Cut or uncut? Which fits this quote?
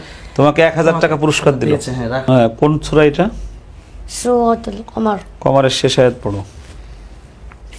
cut